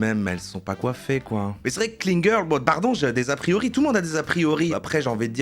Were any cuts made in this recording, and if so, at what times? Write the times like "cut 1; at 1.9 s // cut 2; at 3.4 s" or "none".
cut 1; at 1.6 s // cut 2; at 4.7 s